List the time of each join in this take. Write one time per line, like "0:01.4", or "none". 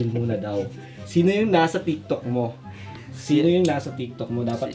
none